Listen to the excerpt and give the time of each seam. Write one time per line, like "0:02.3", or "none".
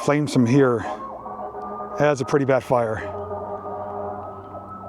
none